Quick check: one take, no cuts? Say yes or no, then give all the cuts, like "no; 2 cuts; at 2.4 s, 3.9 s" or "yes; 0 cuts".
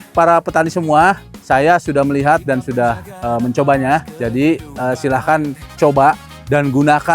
no; 2 cuts; at 1.3 s, 4.1 s